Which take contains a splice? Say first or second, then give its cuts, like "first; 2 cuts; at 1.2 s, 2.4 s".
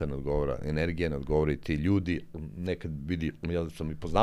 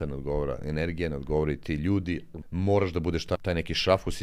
second; 2 cuts; at 2.4 s, 3.3 s